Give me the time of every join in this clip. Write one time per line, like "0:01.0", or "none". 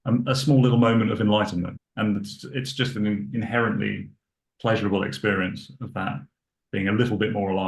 0:01.8